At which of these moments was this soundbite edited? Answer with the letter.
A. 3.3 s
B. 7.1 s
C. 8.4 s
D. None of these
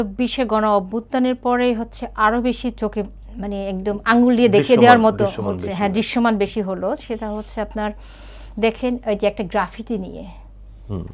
D